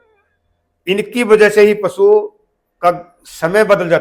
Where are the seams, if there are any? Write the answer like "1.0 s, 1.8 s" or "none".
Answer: none

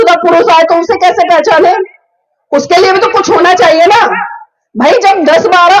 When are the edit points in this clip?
none

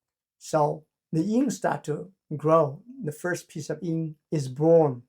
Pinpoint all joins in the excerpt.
4.2 s

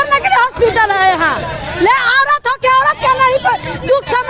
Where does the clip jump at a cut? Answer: none

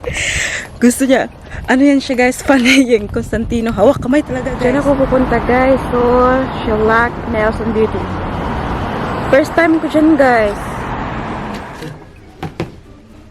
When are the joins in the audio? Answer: 4.4 s, 11.5 s

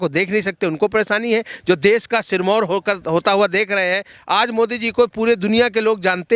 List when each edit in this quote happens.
none

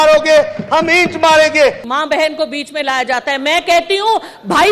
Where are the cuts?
1.8 s

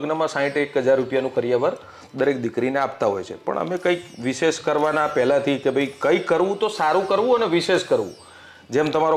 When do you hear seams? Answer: none

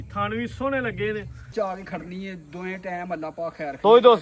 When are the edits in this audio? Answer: 1.5 s

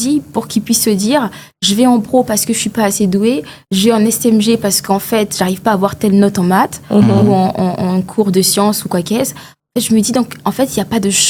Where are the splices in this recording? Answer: none

